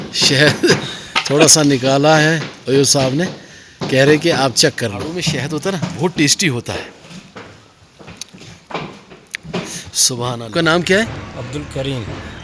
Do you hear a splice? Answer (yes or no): yes